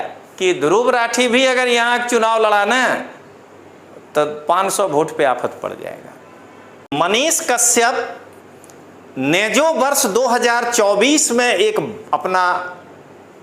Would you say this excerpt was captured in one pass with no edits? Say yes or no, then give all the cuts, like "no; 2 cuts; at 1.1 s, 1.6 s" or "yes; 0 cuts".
no; 1 cut; at 6.9 s